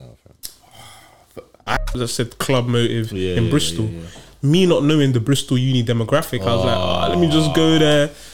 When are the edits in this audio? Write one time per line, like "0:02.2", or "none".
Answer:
0:01.8